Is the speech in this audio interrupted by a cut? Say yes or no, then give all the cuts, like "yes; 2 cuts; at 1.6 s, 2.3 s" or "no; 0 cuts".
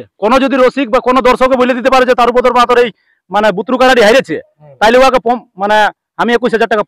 no; 0 cuts